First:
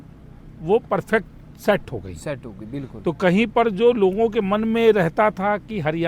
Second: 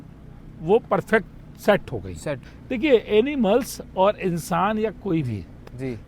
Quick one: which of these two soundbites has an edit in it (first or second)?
second